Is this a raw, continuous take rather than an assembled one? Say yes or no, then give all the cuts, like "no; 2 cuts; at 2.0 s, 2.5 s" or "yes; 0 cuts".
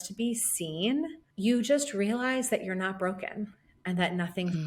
no; 1 cut; at 1.2 s